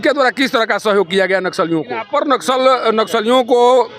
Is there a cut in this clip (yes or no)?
yes